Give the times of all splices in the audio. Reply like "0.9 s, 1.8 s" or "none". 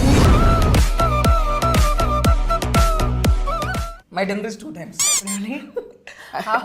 3.9 s